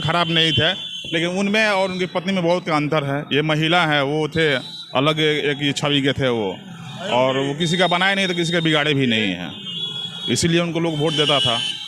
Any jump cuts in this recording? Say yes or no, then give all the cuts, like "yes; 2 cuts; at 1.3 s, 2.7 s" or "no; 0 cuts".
no; 0 cuts